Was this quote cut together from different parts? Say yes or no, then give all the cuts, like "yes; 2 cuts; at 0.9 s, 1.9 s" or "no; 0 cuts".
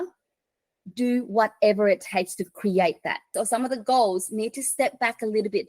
yes; 1 cut; at 3.3 s